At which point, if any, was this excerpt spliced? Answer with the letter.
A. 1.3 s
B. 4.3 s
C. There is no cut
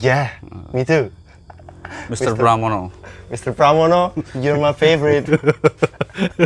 C